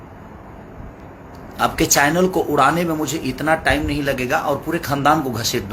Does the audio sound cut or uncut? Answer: uncut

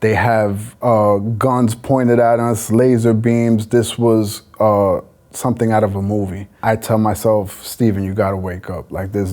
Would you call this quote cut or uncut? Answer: cut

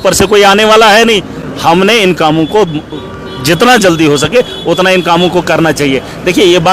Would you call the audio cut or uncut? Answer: uncut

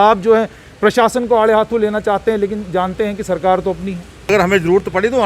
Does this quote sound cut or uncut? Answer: cut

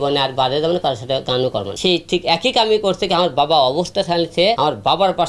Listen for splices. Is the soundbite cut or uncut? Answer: cut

